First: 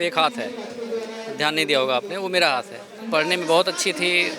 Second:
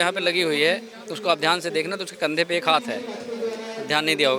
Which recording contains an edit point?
first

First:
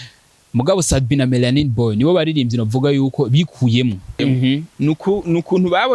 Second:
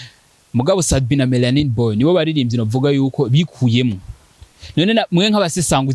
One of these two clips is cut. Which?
first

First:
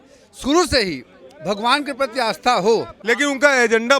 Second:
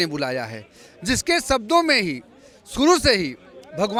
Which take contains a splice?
first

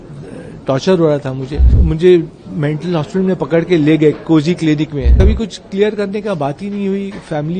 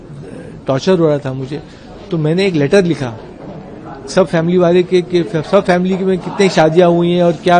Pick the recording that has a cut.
first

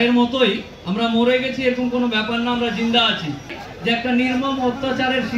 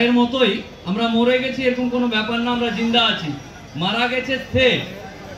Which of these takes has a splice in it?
first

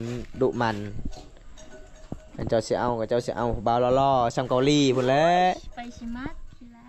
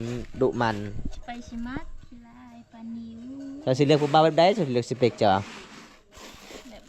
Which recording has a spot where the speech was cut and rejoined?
second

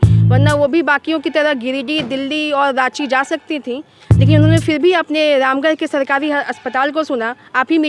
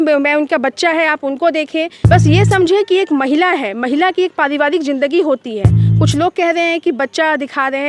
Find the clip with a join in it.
second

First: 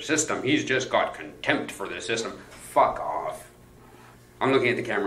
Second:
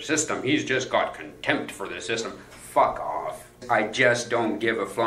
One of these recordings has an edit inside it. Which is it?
second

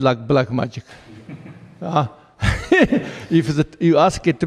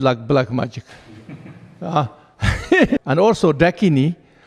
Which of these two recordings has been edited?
second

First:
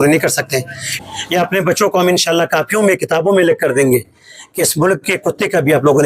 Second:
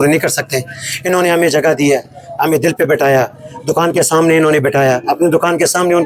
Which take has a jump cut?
first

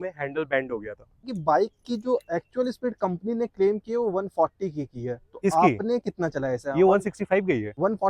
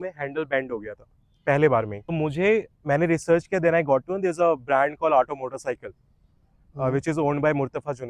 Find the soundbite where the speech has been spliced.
first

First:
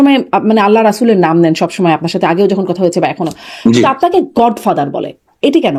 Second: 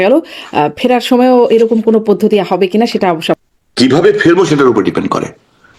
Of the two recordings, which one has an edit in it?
second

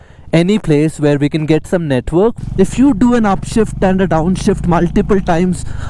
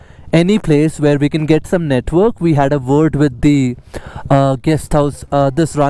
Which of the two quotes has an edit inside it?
first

